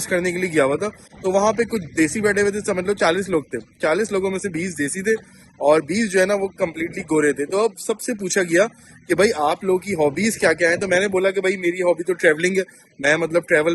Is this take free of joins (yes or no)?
yes